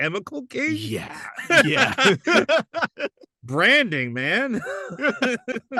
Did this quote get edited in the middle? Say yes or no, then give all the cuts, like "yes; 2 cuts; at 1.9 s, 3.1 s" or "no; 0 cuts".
no; 0 cuts